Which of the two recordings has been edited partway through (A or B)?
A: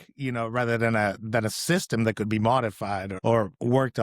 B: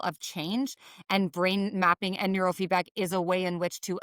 A